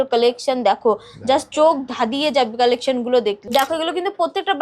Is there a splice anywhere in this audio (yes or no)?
yes